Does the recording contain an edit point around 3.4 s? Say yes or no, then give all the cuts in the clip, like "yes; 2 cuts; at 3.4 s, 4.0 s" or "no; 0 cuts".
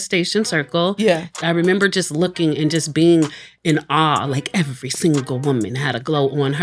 no; 1 cut; at 1.3 s